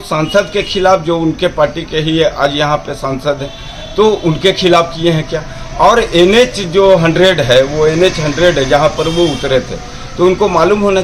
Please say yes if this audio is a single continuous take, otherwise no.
yes